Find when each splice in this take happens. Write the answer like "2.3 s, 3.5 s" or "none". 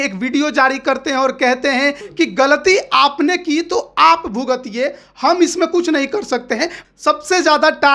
2.0 s, 6.8 s

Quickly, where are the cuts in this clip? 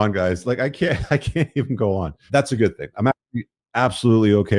2.2 s

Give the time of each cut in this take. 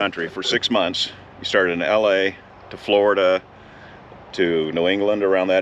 none

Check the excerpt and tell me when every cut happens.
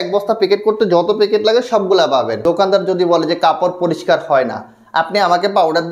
2.4 s

